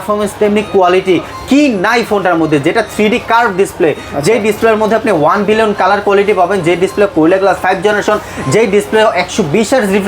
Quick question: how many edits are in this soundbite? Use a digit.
0